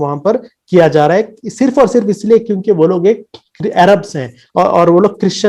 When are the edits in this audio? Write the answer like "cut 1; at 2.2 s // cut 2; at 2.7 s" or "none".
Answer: none